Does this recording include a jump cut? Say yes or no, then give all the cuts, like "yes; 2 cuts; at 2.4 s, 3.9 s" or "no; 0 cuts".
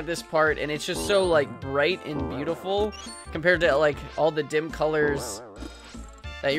no; 0 cuts